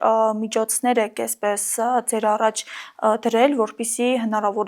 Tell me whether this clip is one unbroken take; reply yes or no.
yes